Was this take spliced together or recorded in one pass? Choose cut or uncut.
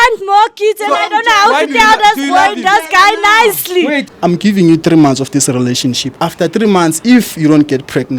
cut